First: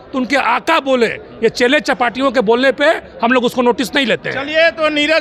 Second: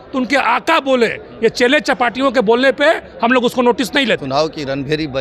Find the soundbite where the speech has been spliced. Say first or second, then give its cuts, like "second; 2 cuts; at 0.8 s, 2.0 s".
second; 1 cut; at 4.2 s